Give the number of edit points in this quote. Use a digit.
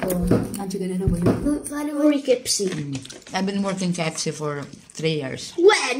1